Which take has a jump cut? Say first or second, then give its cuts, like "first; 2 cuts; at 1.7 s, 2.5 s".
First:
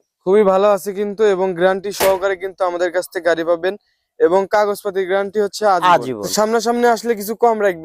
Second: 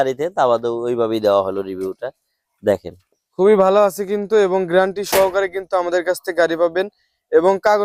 first; 1 cut; at 6.3 s